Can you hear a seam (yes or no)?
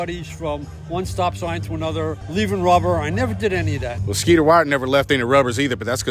yes